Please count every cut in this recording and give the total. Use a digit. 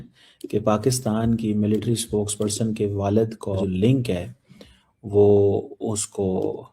1